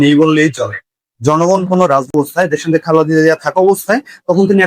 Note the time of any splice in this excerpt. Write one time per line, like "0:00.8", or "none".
0:02.1